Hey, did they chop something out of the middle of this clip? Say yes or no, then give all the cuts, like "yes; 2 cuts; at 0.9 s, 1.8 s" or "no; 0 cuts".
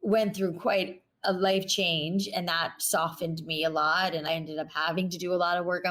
yes; 1 cut; at 4.2 s